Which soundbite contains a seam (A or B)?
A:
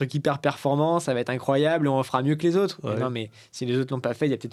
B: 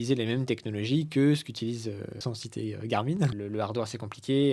B